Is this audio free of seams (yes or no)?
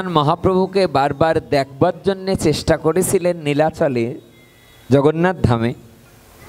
yes